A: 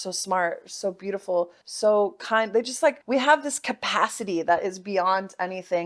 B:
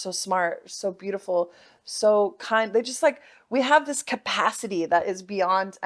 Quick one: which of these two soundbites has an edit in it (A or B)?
A